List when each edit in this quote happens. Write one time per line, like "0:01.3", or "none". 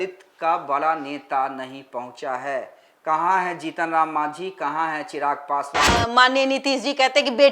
0:05.9